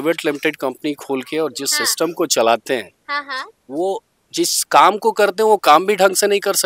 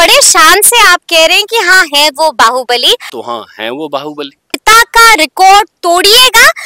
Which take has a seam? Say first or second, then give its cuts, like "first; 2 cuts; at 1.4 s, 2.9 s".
second; 2 cuts; at 3.1 s, 4.6 s